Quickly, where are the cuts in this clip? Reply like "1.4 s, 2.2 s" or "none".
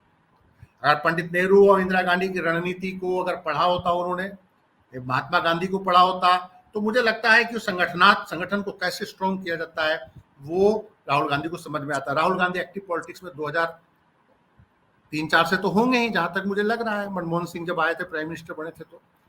none